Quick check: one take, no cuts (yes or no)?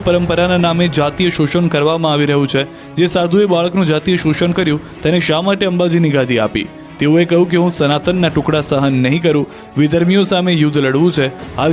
yes